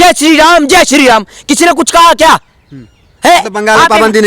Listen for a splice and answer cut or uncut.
uncut